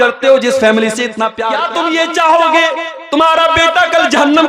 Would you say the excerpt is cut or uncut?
cut